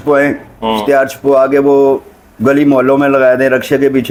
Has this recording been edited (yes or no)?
no